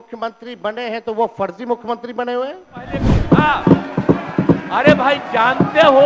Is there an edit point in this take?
yes; 1 cut; at 3.1 s

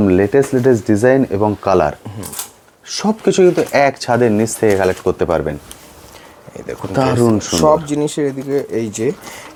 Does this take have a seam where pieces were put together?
no; 0 cuts

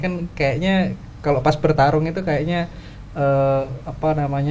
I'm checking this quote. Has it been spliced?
no; 0 cuts

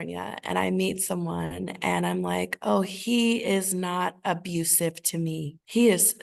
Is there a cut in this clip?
no; 0 cuts

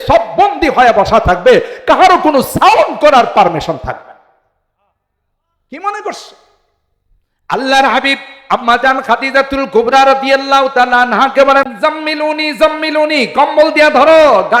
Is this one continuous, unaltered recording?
no; 1 cut; at 11.7 s

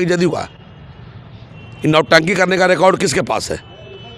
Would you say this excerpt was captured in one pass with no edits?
yes; 0 cuts

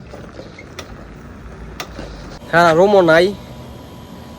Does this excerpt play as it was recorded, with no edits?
no; 1 cut; at 2.4 s

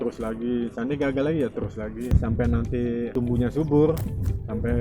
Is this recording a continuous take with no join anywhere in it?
no; 1 cut; at 2.1 s

